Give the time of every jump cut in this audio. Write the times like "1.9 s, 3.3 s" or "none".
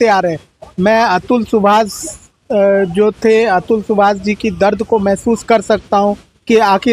none